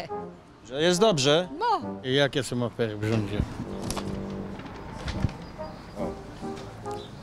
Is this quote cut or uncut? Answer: cut